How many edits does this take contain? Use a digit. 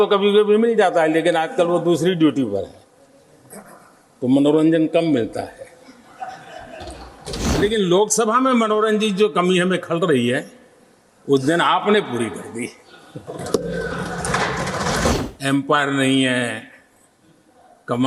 2